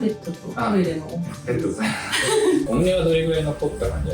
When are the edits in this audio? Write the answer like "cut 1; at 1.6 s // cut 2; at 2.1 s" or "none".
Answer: cut 1; at 2.7 s